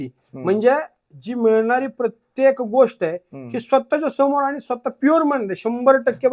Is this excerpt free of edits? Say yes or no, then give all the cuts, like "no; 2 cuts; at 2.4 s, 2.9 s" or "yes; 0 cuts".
yes; 0 cuts